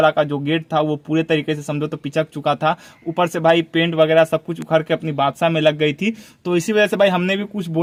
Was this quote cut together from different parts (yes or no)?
no